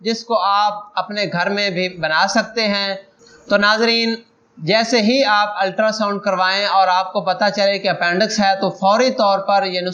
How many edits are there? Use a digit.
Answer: 1